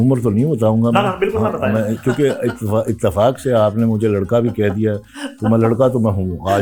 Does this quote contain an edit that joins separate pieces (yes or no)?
no